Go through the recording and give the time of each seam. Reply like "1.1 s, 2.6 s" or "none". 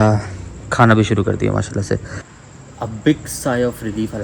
2.2 s